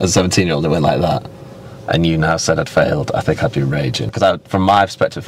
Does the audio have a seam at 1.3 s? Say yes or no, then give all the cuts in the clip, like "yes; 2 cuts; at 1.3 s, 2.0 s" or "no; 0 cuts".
no; 1 cut; at 4.1 s